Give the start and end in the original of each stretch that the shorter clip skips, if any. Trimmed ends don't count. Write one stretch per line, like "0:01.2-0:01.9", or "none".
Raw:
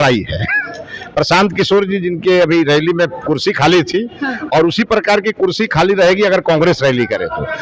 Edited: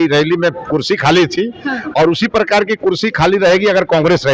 none